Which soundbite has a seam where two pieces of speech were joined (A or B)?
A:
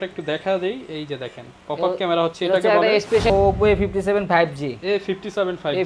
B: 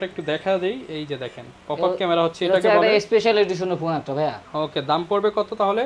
A